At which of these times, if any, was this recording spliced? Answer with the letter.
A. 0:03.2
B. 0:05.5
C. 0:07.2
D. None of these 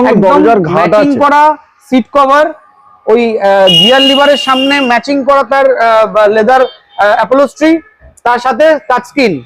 D